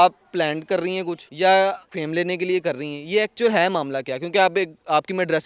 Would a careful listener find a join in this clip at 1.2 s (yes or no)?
yes